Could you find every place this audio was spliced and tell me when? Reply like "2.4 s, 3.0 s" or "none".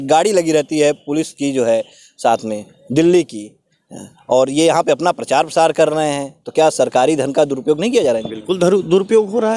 none